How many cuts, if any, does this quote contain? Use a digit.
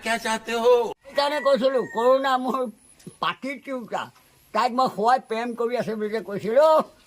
1